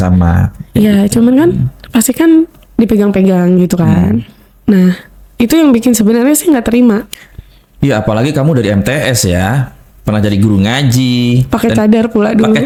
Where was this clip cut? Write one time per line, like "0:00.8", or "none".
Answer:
none